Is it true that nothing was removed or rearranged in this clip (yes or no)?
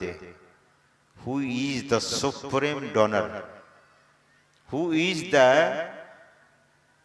yes